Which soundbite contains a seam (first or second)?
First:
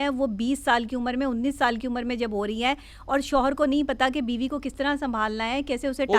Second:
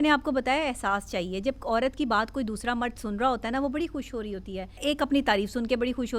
second